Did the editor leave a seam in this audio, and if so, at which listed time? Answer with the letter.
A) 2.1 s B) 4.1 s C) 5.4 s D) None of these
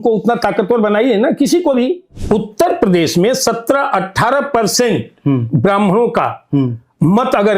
A